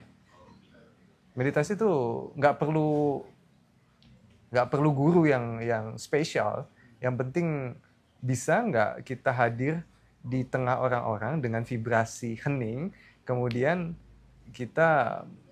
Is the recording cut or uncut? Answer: uncut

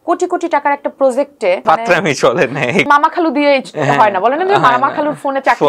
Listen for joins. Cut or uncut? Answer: cut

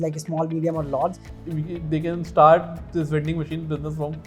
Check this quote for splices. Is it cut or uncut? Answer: cut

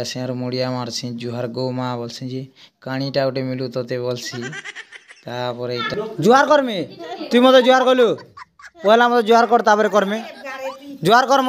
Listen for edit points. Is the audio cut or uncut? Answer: cut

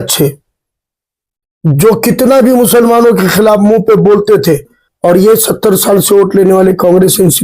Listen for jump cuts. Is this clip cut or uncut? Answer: cut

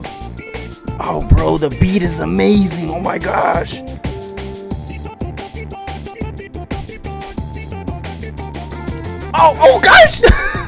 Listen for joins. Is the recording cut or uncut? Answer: uncut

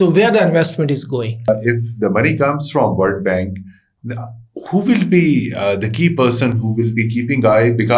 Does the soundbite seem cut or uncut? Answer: cut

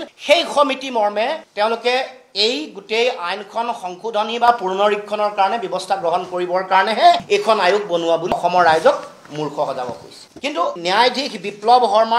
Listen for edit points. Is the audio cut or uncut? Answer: uncut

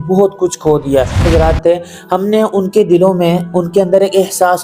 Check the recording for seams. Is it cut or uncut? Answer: cut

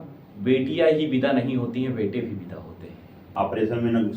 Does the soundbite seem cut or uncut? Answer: cut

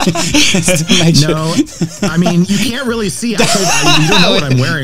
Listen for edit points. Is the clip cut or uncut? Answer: uncut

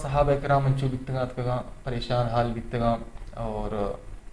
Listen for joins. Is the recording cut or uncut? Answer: uncut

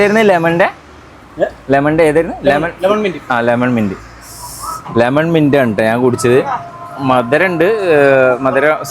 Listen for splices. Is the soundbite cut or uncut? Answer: uncut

